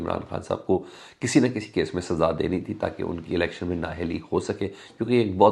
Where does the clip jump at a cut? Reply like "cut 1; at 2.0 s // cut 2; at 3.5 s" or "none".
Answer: none